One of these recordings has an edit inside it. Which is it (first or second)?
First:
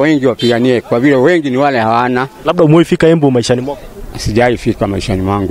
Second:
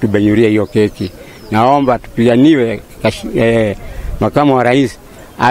first